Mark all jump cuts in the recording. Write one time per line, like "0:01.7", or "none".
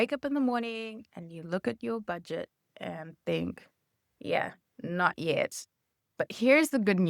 none